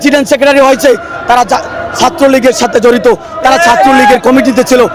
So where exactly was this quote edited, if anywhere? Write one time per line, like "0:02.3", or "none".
none